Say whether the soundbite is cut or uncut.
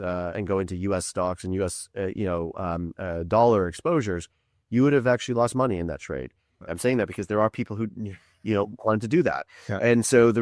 cut